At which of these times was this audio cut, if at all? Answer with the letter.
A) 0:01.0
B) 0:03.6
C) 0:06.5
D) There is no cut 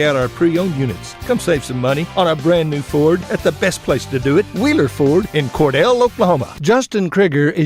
C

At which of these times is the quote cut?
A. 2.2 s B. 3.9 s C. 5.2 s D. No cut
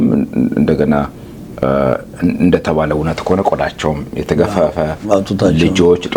D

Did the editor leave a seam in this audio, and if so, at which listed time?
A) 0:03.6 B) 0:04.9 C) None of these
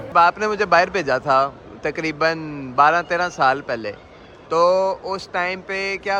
C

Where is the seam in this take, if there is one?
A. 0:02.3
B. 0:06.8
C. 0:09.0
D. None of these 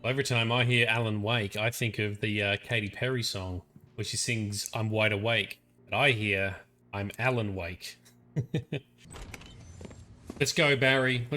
C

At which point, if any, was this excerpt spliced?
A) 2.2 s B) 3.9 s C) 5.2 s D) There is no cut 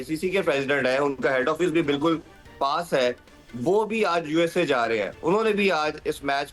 D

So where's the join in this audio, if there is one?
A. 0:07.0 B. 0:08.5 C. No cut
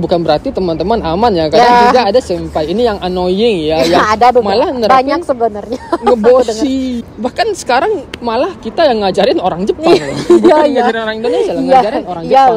A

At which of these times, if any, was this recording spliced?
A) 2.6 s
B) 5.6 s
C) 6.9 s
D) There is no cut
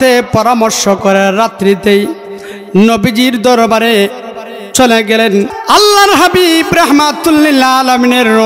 B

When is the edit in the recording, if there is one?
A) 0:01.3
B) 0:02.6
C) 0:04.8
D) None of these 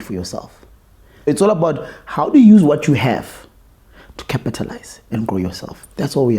A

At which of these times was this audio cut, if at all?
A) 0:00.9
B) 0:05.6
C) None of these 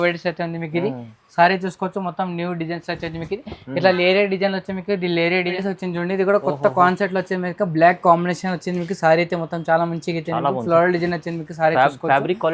B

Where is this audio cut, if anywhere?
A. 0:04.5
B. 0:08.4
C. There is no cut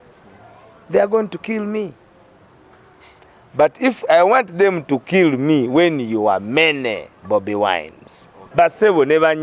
B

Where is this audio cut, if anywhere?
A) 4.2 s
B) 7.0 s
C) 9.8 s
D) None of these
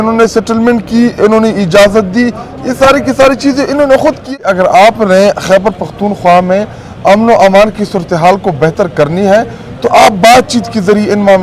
A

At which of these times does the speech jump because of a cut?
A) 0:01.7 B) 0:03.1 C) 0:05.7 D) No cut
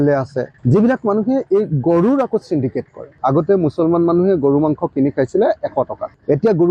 B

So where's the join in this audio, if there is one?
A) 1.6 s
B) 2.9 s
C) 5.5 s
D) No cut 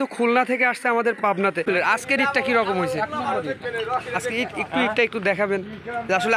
A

